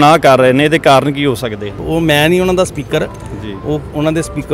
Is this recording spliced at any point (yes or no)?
yes